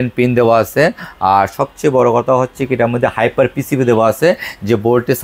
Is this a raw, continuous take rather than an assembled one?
yes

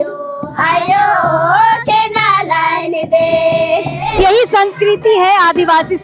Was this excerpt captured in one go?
no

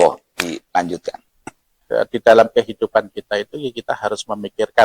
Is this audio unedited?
no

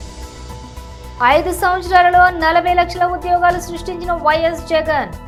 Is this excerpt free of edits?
yes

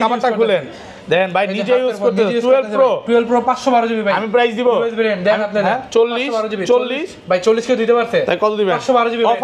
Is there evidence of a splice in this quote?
no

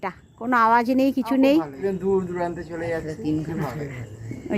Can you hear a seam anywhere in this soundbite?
yes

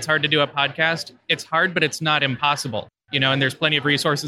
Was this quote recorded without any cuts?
yes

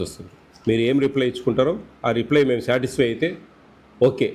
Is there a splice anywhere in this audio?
no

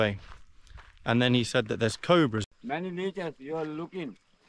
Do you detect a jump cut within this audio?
yes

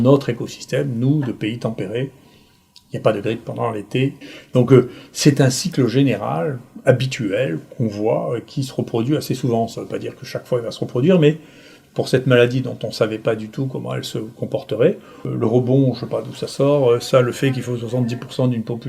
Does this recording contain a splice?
yes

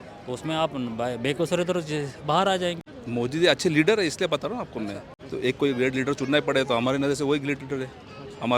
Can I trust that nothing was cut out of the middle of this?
no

